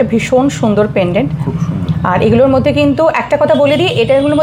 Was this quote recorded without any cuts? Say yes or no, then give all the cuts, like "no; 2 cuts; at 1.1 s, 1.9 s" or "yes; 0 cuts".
yes; 0 cuts